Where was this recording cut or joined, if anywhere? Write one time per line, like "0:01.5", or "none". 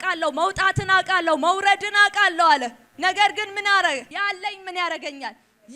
0:02.8
0:04.1